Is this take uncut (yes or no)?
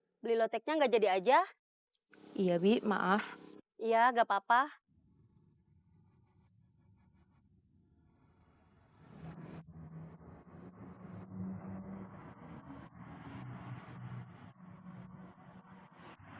yes